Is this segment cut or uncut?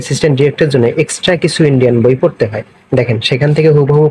uncut